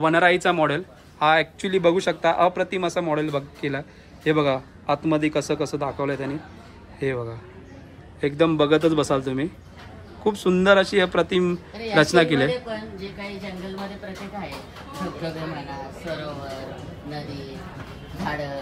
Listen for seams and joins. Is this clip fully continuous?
yes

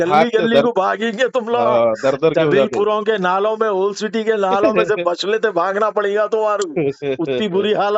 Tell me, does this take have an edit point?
no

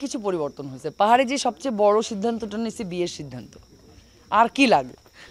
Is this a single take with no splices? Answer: yes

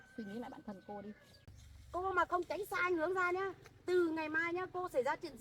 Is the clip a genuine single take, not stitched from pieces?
no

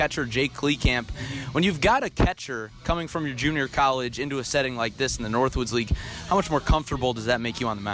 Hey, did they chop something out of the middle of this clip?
no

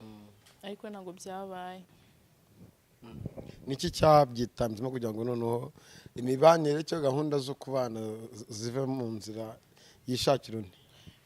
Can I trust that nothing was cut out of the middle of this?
yes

